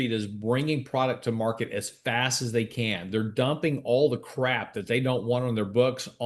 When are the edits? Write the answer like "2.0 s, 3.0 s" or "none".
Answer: none